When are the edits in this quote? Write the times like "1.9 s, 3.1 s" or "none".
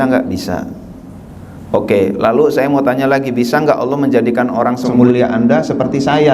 5.0 s